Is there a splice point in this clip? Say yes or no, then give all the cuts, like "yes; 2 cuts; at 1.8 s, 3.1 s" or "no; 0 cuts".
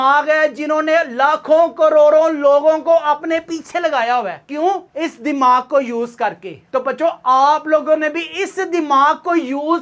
no; 0 cuts